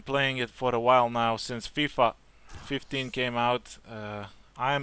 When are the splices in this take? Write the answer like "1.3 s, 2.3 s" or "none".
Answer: 3.2 s